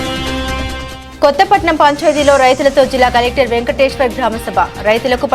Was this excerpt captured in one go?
no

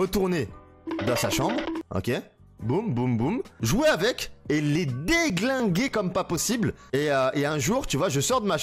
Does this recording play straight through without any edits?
yes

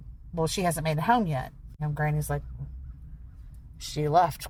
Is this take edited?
no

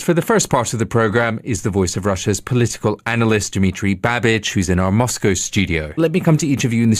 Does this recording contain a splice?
yes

